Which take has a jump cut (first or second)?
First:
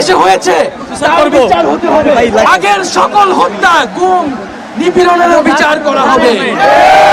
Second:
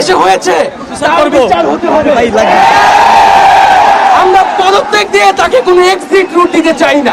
first